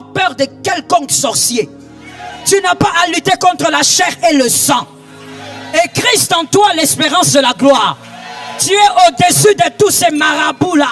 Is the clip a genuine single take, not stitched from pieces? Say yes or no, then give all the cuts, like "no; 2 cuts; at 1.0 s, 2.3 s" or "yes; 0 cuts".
yes; 0 cuts